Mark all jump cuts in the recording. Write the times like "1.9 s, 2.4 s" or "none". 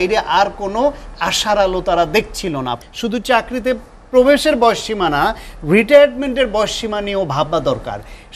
2.8 s